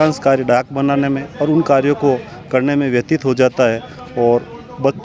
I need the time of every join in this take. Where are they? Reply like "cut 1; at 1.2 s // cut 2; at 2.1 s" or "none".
none

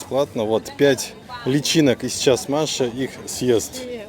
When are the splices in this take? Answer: none

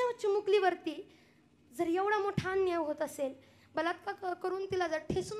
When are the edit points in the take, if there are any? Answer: none

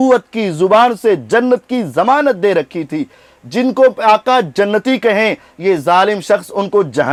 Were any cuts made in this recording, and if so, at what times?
none

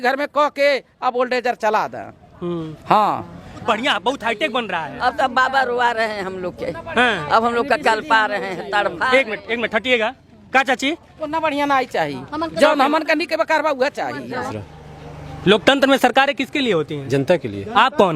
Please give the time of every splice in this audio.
cut 1; at 3.6 s // cut 2; at 14.5 s

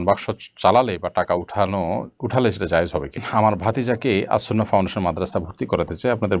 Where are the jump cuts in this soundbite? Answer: cut 1; at 3.2 s

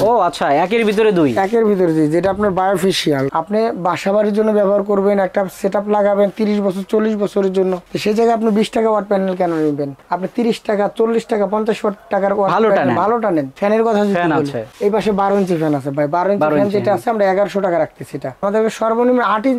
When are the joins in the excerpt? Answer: cut 1; at 3.3 s // cut 2; at 13.5 s // cut 3; at 18.4 s

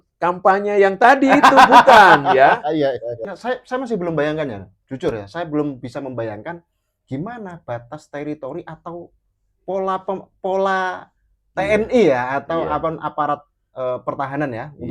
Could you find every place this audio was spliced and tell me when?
cut 1; at 3.2 s

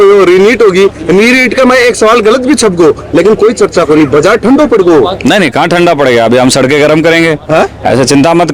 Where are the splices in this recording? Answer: none

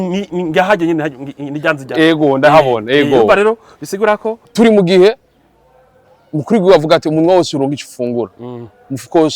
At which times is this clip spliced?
cut 1; at 4.5 s

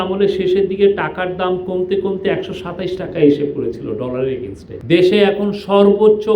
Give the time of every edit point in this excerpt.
cut 1; at 4.7 s

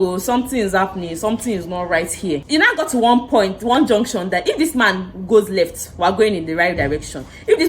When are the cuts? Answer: cut 1; at 2.4 s

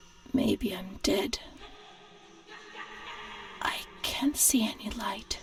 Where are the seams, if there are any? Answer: none

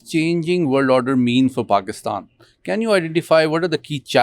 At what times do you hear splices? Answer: none

